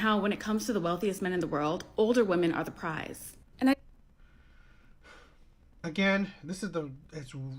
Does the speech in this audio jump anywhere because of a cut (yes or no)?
no